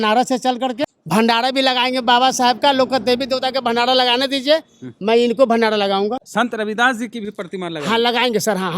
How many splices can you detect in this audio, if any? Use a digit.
2